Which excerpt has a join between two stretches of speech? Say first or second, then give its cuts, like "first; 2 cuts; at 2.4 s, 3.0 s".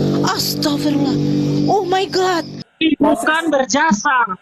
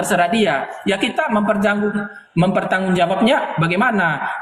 first; 1 cut; at 2.6 s